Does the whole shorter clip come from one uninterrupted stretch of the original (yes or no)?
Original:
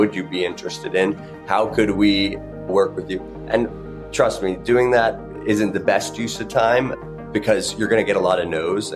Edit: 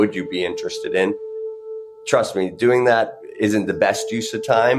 no